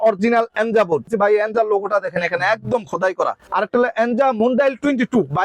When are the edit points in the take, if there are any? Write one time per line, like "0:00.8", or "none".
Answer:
0:01.1
0:03.4